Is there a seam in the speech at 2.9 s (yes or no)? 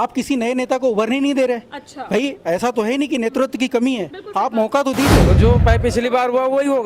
no